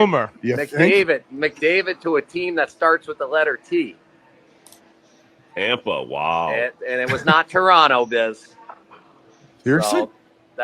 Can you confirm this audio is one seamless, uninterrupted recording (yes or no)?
yes